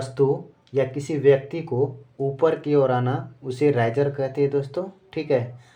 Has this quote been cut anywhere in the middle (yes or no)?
no